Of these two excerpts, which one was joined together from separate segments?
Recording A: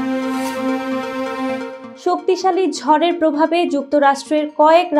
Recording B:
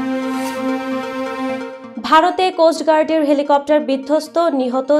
A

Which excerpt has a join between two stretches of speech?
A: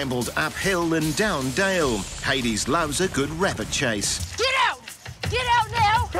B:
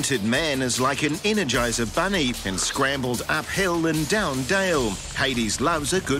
A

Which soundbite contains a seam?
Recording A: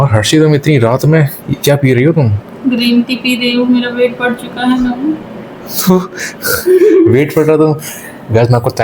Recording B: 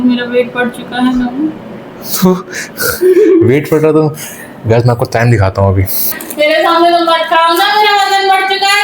B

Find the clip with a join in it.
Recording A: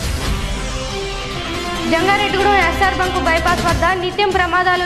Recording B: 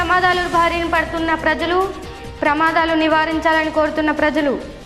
A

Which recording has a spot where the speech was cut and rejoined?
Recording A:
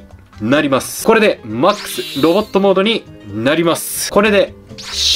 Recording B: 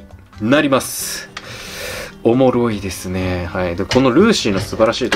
A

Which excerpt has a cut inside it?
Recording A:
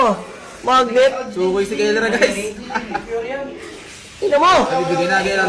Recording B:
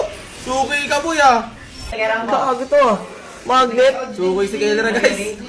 B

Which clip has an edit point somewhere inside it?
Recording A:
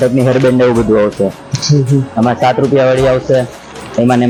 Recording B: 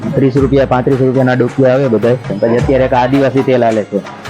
B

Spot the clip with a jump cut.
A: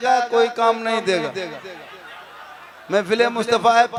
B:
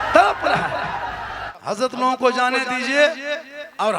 B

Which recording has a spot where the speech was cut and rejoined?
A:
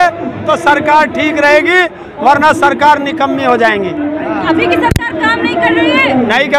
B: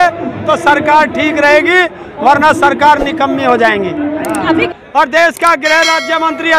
B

